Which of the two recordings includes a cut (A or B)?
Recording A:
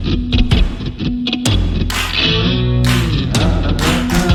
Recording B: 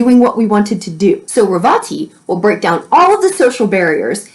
B